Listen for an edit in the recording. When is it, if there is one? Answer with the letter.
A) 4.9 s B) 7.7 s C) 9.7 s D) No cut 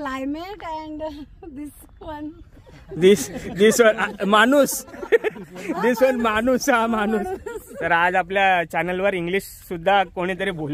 B